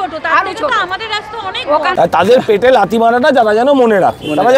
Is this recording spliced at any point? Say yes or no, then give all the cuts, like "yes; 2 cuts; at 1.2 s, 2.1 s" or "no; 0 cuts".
yes; 1 cut; at 1.9 s